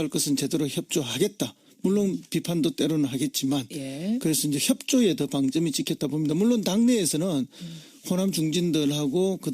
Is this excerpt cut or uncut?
uncut